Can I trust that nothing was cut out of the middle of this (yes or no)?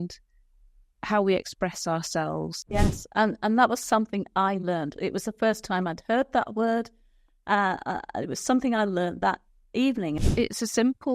no